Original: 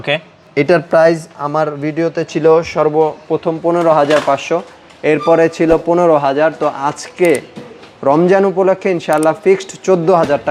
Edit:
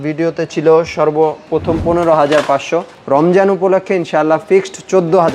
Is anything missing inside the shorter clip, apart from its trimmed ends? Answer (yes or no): yes